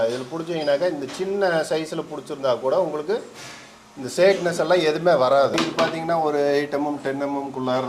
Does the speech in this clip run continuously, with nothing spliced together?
no; 1 cut; at 5.5 s

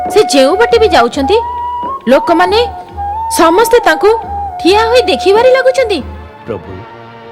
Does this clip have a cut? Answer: yes; 1 cut; at 6.2 s

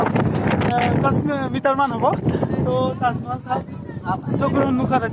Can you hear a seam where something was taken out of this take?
no; 0 cuts

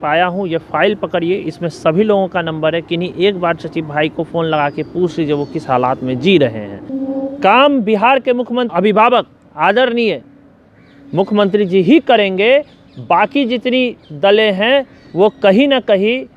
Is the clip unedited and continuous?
no; 2 cuts; at 7.0 s, 8.7 s

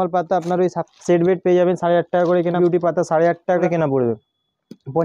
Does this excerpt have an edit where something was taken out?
yes; 3 cuts; at 0.9 s, 2.6 s, 3.6 s

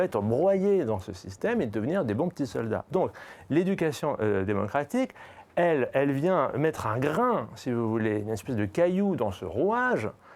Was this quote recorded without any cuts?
yes; 0 cuts

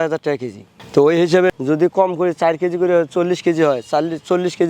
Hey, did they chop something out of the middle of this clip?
yes; 1 cut; at 1.5 s

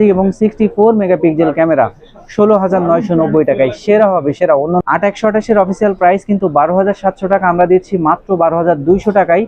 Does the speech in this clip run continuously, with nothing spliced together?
no; 1 cut; at 4.8 s

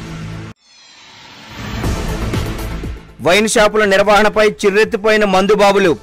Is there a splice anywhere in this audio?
yes; 1 cut; at 2.4 s

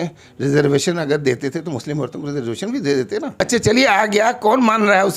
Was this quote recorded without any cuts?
no; 1 cut; at 3.3 s

